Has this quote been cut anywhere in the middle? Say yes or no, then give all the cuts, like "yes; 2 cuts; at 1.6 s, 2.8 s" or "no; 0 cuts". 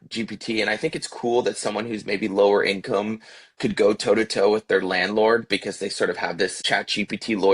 yes; 1 cut; at 6.6 s